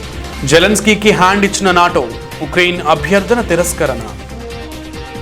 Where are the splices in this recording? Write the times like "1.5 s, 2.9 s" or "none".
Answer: 4.2 s